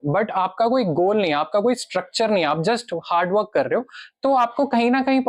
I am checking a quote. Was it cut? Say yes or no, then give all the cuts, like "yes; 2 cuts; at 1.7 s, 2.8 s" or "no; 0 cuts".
no; 0 cuts